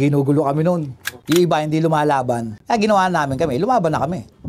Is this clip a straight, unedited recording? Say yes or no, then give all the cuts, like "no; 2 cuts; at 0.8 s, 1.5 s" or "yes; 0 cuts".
no; 1 cut; at 1.2 s